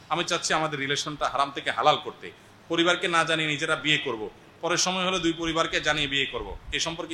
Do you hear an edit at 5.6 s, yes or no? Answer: no